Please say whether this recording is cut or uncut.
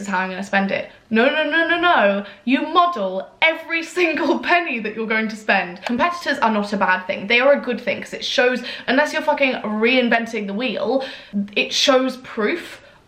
cut